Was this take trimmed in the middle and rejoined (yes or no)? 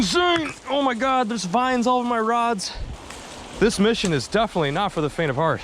yes